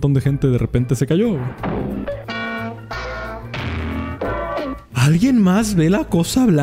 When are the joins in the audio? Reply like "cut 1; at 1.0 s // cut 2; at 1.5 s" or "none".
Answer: cut 1; at 4.9 s